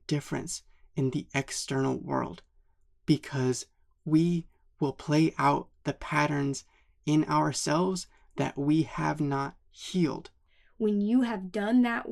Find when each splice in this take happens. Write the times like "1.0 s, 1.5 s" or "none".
10.5 s